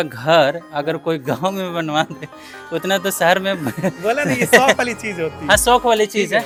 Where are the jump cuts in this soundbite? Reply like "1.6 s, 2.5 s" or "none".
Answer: none